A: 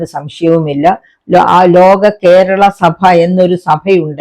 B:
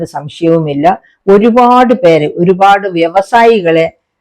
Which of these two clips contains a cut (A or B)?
A